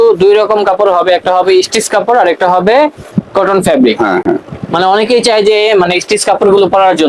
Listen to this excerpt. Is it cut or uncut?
uncut